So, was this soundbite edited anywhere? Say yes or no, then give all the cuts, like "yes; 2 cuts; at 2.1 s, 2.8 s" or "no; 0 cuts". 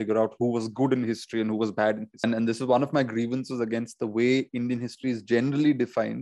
yes; 1 cut; at 2.2 s